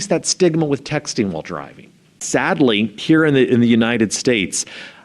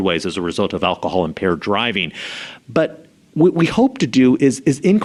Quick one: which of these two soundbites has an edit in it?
first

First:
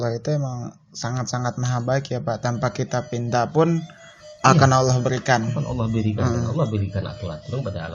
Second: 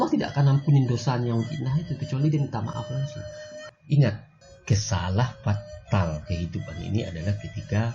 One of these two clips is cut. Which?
second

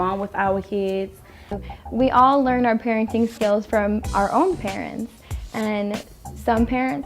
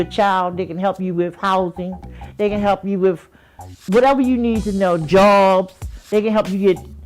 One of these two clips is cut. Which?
first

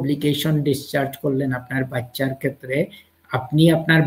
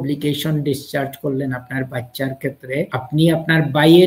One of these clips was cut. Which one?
second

